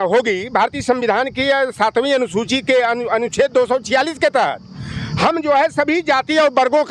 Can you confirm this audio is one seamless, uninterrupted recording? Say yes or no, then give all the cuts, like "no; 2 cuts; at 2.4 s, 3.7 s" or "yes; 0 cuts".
yes; 0 cuts